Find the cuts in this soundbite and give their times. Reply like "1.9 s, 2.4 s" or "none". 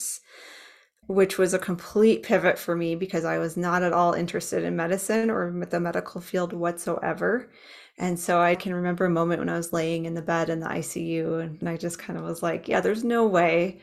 11.5 s